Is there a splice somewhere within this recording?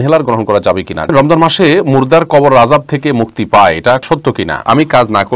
yes; 2 cuts; at 1.1 s, 4.1 s

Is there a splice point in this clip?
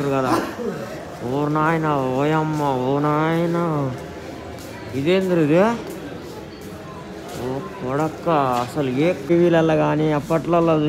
yes; 1 cut; at 9.3 s

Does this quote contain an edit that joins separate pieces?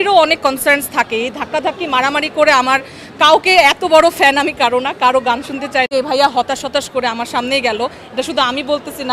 yes; 1 cut; at 5.9 s

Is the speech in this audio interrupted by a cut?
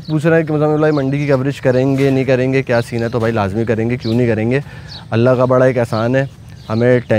no; 0 cuts

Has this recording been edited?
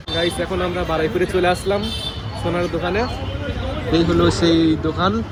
no; 0 cuts

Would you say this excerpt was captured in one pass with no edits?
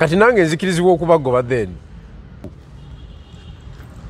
no; 1 cut; at 2.5 s

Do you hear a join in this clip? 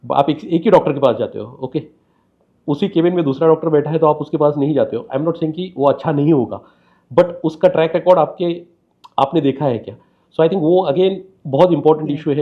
no; 0 cuts

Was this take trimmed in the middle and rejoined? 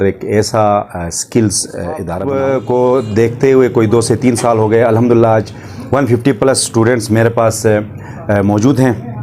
yes; 1 cut; at 2.1 s

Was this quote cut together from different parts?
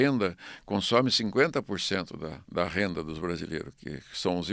yes; 1 cut; at 2.4 s

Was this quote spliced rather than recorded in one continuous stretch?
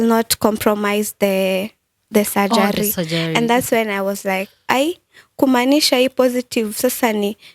no; 0 cuts

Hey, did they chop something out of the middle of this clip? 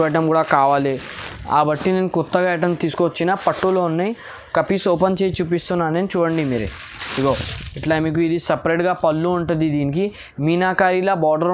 no; 0 cuts

